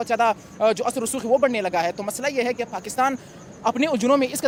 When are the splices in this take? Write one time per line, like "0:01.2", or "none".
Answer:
none